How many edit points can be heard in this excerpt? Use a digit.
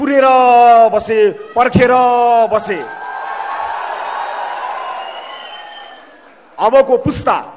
0